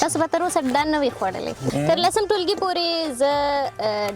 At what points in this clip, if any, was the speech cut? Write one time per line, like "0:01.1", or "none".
0:01.6